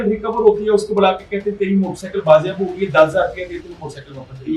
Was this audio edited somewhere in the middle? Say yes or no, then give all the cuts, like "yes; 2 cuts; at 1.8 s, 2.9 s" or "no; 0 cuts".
no; 0 cuts